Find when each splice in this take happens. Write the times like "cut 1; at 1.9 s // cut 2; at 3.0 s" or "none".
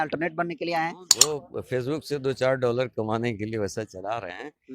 cut 1; at 1.3 s